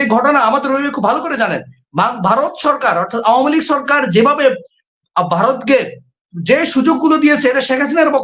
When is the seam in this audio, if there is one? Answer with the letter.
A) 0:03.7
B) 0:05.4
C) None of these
C